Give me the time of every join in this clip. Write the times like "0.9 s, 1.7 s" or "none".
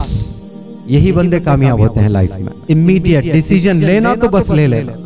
2.5 s